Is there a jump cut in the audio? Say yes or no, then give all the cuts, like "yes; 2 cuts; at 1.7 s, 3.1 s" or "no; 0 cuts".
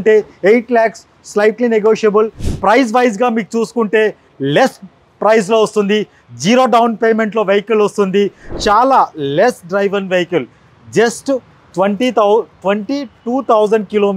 yes; 2 cuts; at 2.4 s, 8.5 s